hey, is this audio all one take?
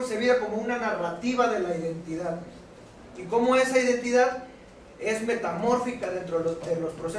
yes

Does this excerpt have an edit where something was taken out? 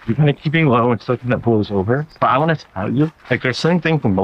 yes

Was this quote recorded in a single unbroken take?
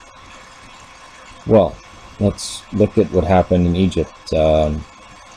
yes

